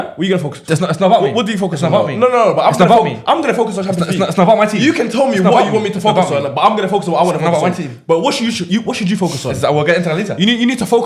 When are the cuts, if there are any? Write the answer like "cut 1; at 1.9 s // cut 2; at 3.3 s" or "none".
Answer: none